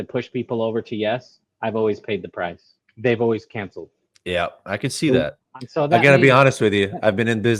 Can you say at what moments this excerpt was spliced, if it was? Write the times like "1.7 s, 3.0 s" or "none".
5.4 s